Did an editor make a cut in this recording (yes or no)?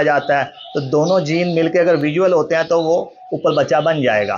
no